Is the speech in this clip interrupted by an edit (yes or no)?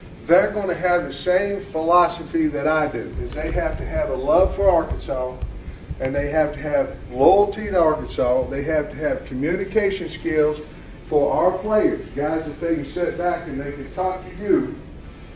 no